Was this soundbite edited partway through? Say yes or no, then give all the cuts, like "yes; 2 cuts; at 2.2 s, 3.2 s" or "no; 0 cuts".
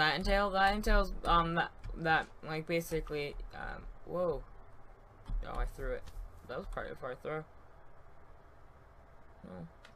yes; 1 cut; at 5.2 s